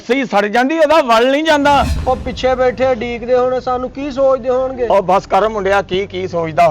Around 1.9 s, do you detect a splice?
yes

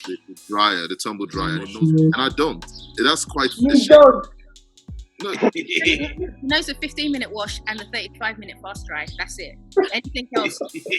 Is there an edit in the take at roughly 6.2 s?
no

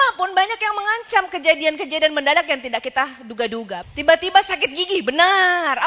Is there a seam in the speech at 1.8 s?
no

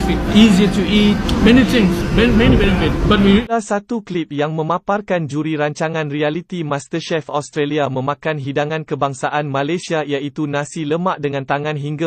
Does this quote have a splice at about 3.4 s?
yes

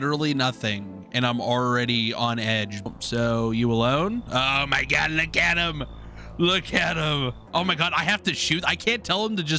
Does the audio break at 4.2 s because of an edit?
no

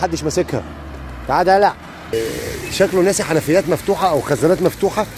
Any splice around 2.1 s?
yes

